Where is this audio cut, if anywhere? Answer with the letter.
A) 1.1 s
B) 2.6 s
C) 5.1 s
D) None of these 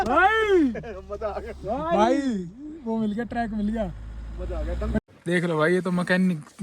C